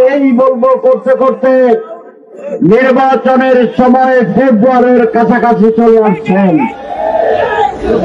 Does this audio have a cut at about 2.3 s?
no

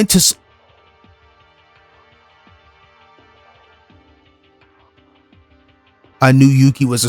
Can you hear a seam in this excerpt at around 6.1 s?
yes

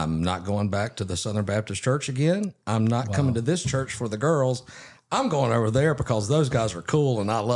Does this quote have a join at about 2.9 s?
no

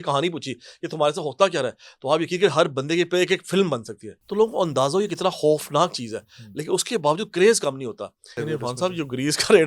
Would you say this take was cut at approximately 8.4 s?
yes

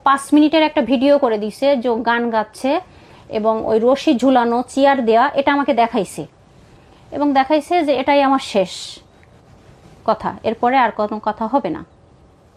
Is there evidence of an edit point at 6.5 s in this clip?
no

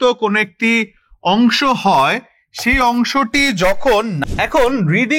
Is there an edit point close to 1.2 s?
no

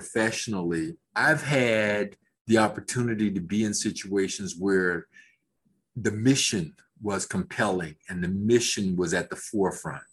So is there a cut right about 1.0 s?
yes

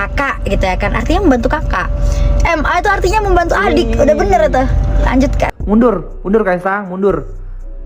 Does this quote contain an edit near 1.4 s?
no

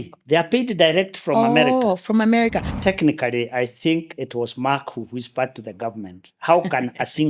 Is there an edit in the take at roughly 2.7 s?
yes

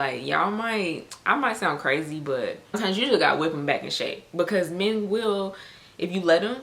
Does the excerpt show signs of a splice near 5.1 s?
no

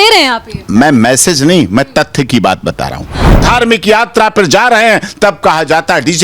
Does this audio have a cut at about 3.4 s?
yes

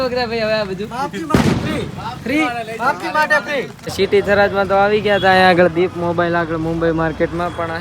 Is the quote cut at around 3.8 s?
yes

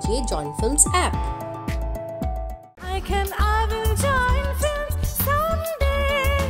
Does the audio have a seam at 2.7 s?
no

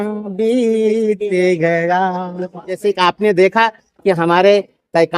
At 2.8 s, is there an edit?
yes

